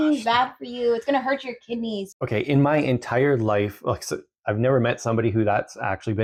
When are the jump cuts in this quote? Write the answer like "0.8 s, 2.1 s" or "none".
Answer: none